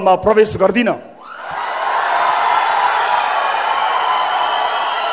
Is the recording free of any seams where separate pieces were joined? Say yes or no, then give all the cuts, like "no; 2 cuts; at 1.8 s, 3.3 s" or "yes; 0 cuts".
yes; 0 cuts